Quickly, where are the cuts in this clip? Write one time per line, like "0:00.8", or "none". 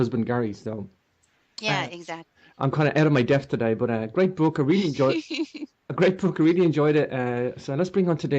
0:01.2